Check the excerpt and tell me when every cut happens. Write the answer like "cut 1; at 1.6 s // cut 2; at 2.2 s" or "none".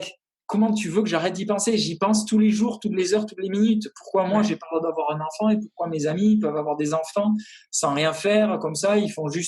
none